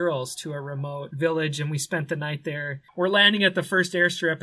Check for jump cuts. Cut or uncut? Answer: cut